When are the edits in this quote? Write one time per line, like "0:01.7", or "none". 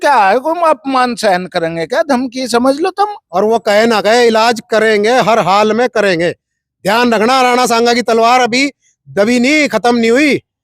0:03.2